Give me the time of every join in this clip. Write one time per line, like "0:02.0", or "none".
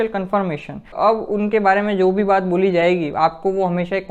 0:00.9